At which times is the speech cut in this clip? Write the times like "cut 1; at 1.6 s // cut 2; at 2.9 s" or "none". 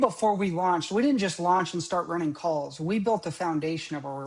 none